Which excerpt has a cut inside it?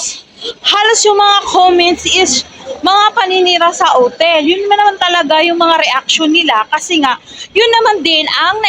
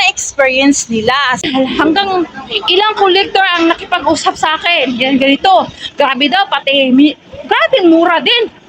second; 1 cut; at 1.4 s

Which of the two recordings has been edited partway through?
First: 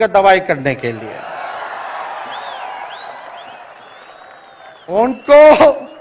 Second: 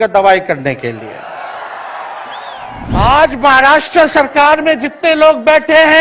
second; 1 cut; at 2.9 s

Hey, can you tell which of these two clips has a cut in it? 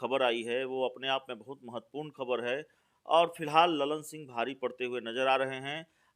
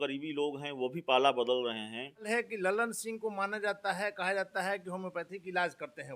second; 1 cut; at 2.2 s

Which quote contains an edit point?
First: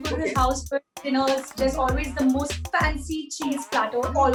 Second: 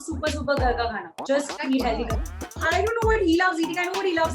second; 1 cut; at 2.6 s

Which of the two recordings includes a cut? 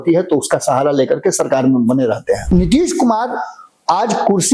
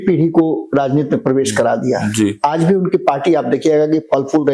first; 1 cut; at 2.4 s

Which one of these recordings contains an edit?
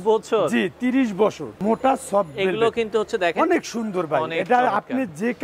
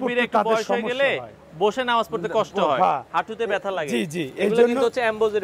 first; 1 cut; at 1.5 s

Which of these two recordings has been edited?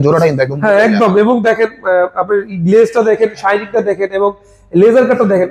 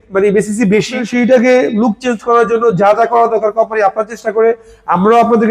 second; 1 cut; at 1.0 s

